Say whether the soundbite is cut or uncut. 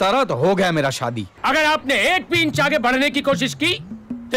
cut